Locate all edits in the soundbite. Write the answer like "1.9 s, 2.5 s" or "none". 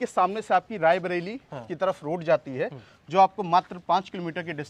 none